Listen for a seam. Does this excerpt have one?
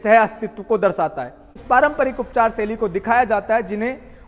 yes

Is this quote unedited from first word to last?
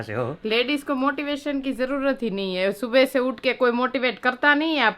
yes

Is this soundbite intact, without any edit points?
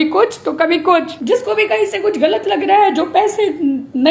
no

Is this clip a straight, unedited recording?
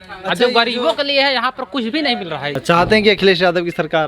no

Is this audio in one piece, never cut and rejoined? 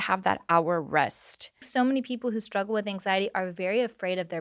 no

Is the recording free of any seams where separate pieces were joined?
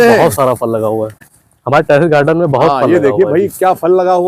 no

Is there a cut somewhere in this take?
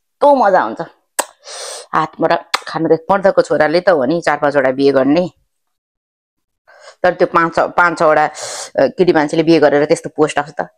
yes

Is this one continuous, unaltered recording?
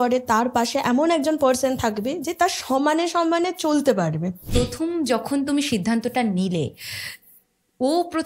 no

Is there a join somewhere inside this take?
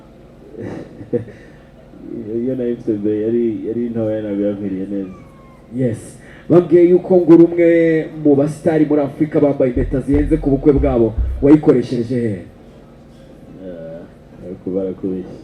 no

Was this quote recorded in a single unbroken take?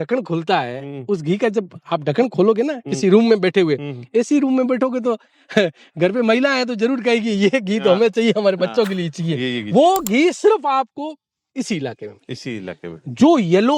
yes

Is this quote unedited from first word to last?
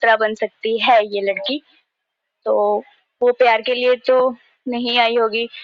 yes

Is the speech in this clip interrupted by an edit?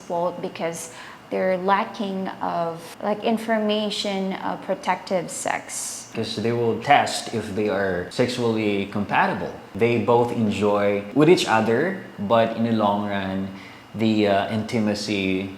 yes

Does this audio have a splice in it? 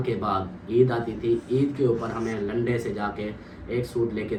no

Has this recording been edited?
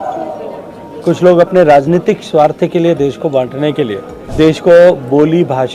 yes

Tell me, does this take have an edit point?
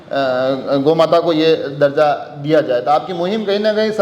no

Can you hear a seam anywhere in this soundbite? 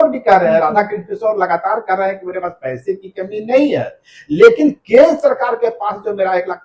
no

